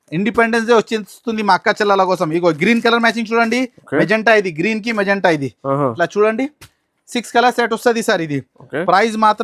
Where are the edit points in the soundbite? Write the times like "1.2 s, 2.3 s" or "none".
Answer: none